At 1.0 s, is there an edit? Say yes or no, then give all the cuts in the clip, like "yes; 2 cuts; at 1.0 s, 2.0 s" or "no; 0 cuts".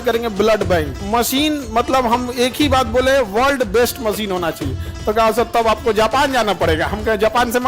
yes; 1 cut; at 1.0 s